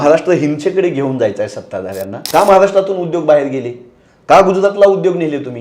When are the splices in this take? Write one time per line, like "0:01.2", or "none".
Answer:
0:02.1

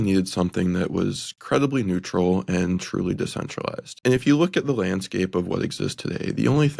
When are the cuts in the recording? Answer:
0:03.9

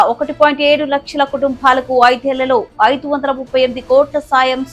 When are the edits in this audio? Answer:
none

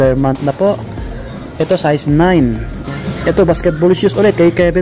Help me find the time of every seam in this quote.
0:02.9

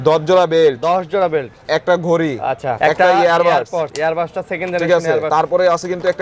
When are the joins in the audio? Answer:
0:02.8
0:03.9
0:05.3

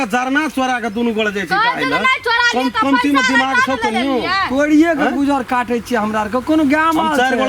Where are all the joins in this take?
none

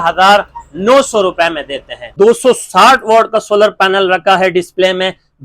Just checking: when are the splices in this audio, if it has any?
0:02.1

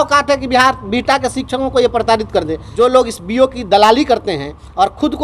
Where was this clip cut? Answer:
0:02.6

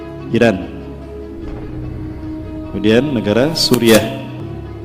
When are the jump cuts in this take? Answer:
none

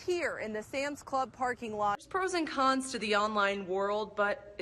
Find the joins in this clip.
0:02.0

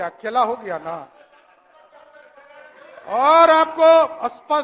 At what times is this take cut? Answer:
none

